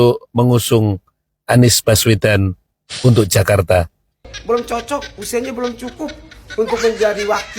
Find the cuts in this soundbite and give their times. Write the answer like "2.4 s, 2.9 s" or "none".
4.3 s